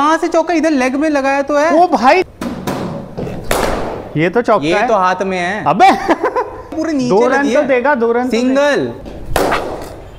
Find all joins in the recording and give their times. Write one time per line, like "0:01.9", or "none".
0:02.3
0:06.8
0:09.1